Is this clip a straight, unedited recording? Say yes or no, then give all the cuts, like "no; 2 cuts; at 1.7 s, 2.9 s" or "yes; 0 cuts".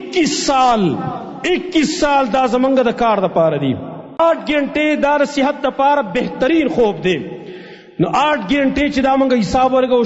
no; 1 cut; at 4.2 s